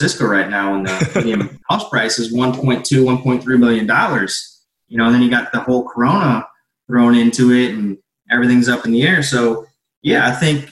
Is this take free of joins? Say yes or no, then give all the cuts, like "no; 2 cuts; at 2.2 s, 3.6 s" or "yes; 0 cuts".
no; 1 cut; at 1.5 s